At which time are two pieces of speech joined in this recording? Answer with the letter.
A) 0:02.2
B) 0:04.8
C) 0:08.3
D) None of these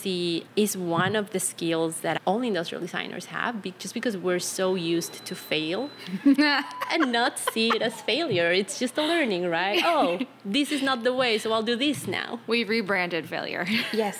A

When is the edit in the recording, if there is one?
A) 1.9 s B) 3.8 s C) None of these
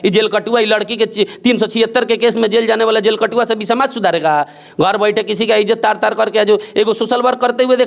C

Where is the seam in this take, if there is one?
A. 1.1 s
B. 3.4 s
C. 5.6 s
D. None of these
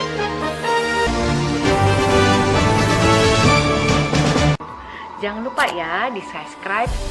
A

